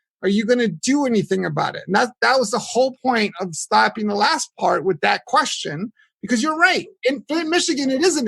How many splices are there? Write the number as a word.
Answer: zero